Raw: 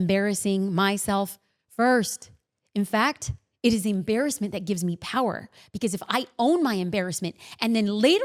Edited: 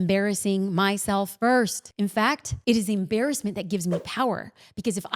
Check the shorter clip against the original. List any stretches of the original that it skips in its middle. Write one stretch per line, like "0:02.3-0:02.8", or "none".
0:01.3-0:01.7
0:02.6-0:03.2